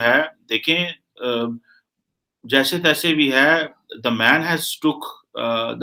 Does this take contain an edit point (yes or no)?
no